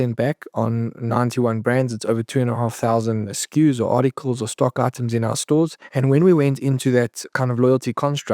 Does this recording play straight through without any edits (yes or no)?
no